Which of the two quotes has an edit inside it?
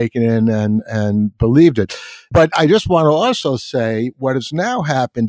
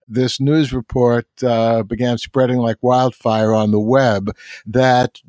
first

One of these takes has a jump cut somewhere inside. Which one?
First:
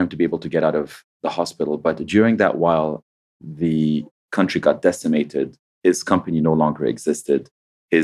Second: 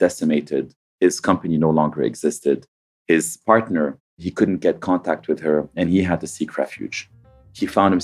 second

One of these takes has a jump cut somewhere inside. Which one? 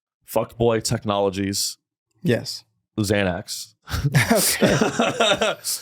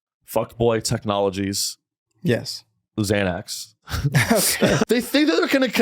second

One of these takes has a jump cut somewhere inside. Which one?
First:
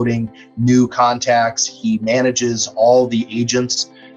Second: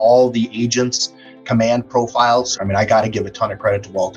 second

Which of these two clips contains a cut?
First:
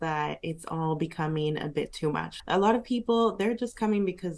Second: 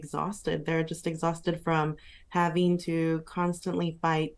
first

